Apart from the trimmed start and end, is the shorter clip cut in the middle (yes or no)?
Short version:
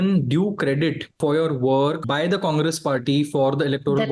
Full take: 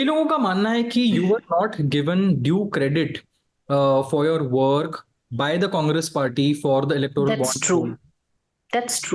yes